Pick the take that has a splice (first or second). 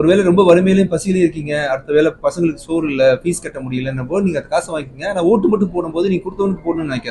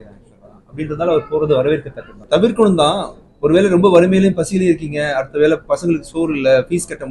second